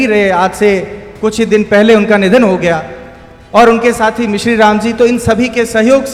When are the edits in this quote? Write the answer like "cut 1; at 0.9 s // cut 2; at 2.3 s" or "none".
none